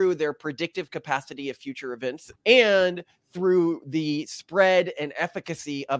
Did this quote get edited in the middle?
yes; 1 cut; at 2.3 s

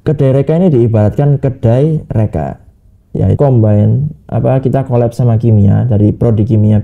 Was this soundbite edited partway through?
yes; 1 cut; at 3.4 s

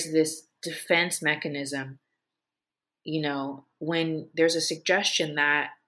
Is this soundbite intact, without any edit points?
yes; 0 cuts

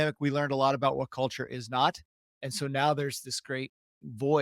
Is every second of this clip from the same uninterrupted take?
no; 1 cut; at 2.4 s

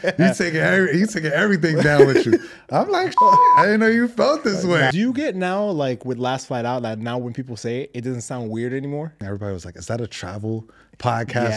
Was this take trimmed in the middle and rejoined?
yes; 2 cuts; at 4.9 s, 9.2 s

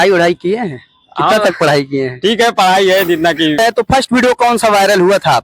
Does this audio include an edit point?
yes; 1 cut; at 3.6 s

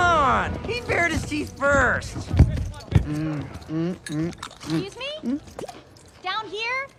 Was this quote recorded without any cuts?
yes; 0 cuts

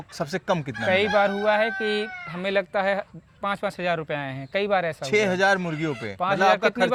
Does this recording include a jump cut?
no; 0 cuts

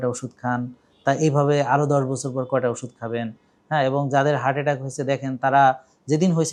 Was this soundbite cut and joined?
no; 0 cuts

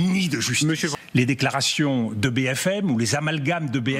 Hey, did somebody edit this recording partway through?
yes; 1 cut; at 0.9 s

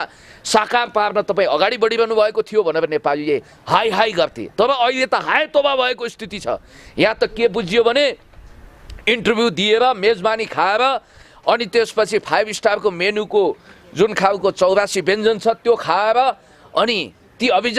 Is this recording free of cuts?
yes; 0 cuts

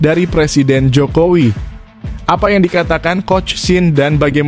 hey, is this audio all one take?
yes; 0 cuts

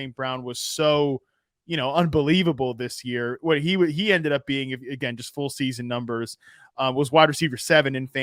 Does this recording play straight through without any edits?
yes; 0 cuts

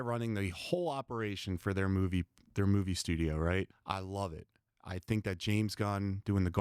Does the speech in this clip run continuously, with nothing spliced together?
no; 1 cut; at 3.8 s

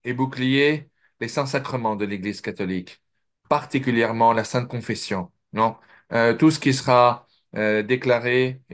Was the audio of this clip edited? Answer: yes; 1 cut; at 5.4 s

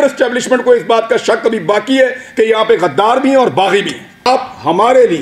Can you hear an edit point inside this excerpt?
yes; 1 cut; at 4.3 s

